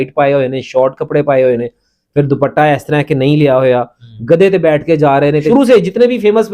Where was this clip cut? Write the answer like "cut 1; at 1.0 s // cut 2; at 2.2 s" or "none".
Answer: cut 1; at 5.4 s